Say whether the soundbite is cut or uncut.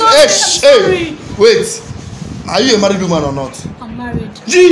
uncut